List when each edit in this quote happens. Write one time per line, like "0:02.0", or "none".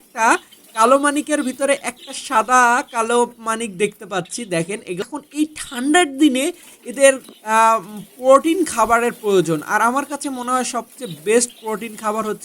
0:05.0